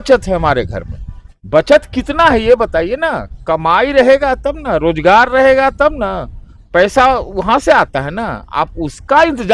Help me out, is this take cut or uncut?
uncut